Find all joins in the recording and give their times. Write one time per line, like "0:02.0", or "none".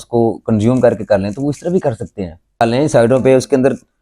0:02.6